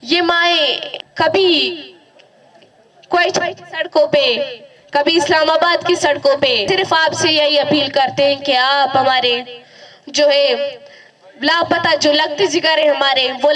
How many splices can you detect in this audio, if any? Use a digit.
2